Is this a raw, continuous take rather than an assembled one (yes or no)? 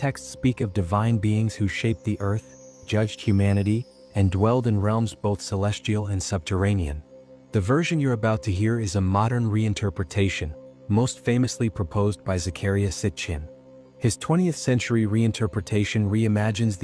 yes